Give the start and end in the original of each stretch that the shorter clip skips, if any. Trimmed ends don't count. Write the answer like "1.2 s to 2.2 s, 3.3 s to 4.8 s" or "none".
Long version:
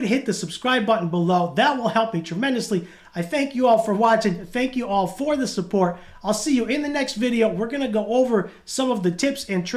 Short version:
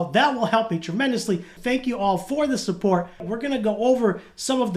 3.0 s to 4.4 s, 6.2 s to 7.6 s